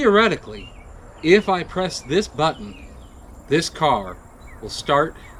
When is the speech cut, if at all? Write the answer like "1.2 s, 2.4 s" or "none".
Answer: none